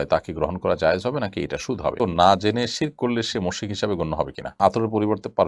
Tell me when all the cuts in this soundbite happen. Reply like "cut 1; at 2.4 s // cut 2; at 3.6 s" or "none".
cut 1; at 2.0 s // cut 2; at 4.6 s